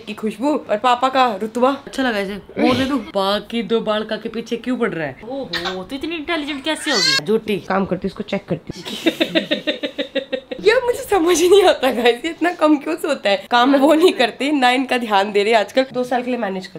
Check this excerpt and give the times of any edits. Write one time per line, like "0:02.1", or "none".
0:01.9
0:03.1
0:05.2
0:07.6
0:08.7
0:10.5
0:13.5
0:15.9